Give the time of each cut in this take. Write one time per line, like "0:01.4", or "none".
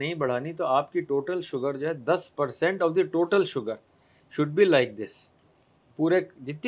none